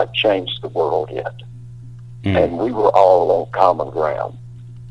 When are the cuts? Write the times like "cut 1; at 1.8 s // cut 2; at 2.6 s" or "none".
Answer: none